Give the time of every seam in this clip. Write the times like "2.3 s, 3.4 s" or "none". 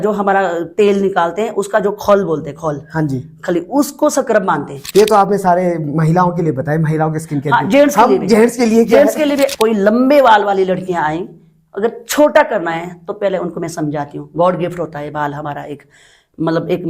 4.8 s, 9.5 s